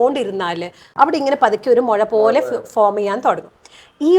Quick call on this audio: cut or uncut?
cut